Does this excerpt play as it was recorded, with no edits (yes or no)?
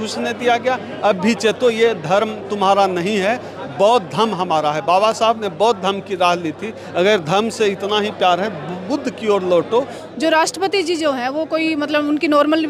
no